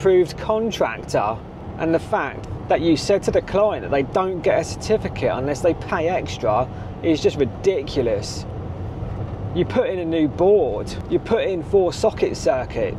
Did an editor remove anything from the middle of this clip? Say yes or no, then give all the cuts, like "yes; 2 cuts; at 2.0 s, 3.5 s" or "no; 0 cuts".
no; 0 cuts